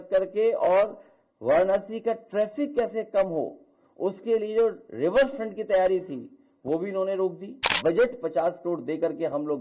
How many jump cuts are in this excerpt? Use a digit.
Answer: 1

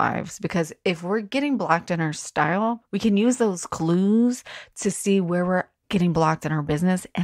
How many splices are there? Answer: 2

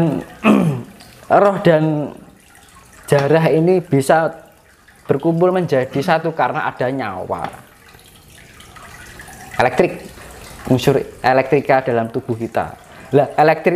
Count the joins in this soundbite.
0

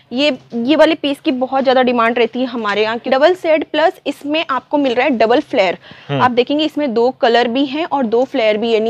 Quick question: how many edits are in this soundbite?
1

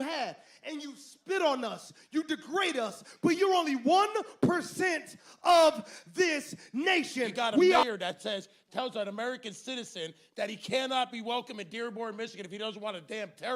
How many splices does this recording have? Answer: 1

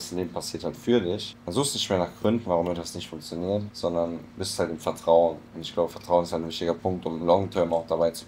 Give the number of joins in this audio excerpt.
2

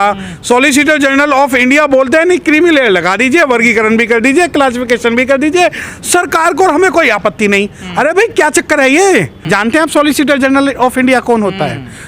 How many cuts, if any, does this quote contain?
1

